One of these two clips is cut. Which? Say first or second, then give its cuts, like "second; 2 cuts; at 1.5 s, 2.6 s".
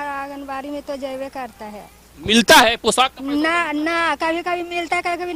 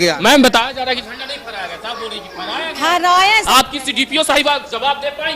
second; 1 cut; at 3.5 s